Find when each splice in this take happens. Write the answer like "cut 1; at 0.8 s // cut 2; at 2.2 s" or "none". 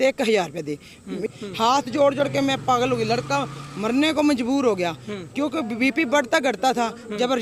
cut 1; at 1.2 s